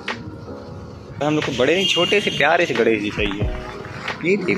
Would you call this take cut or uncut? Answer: cut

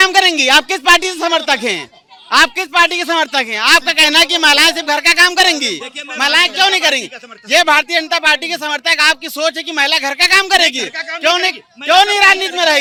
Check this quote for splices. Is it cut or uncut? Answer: uncut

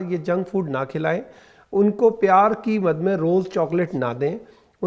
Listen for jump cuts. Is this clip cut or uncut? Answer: uncut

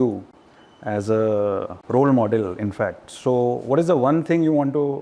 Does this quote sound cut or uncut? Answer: cut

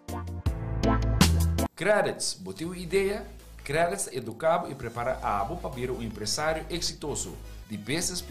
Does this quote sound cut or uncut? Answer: uncut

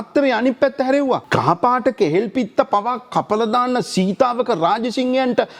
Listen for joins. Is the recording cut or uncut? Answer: cut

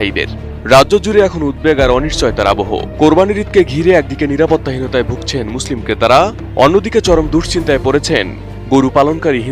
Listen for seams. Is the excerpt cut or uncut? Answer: uncut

